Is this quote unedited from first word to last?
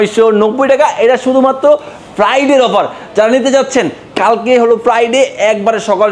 yes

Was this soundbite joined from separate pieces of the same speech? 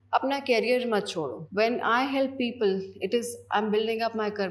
yes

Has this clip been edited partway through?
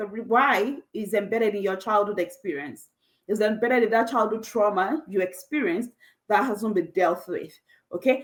no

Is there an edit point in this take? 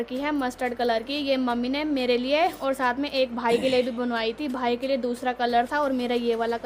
no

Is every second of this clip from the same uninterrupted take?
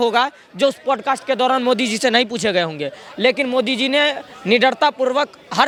yes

